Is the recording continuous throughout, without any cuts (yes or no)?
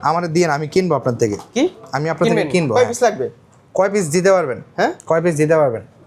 yes